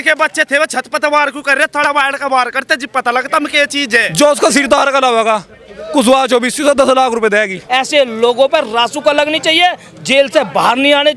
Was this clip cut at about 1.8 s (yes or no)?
no